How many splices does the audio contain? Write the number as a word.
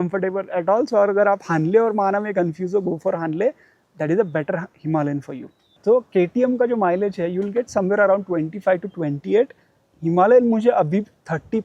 one